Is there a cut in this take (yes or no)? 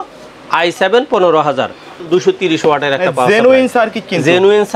yes